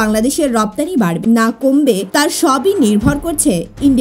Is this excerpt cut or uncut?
cut